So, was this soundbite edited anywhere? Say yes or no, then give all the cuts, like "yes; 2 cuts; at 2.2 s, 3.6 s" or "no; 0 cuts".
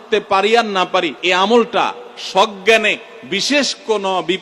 yes; 1 cut; at 1.2 s